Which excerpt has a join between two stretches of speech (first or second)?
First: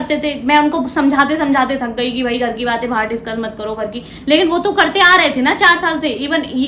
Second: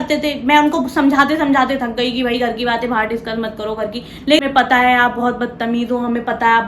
second